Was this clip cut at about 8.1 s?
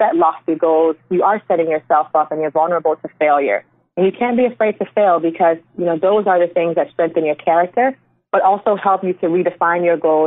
no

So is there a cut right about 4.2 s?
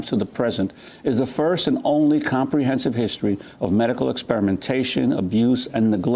yes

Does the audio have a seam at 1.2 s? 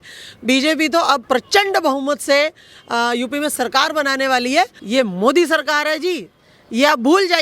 yes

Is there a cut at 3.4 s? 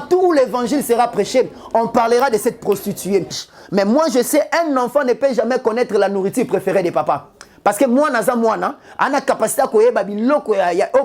yes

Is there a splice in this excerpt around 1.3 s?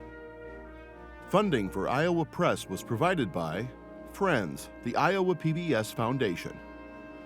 yes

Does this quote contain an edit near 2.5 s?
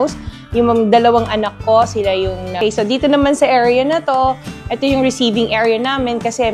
yes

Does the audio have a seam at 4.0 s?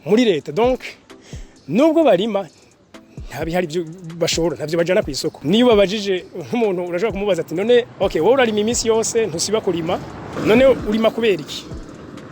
no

